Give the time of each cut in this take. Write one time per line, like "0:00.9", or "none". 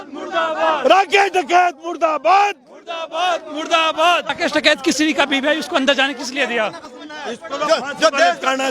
0:04.3
0:06.9